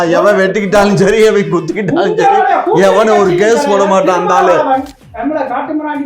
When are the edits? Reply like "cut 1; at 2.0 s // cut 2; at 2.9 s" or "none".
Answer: cut 1; at 5.0 s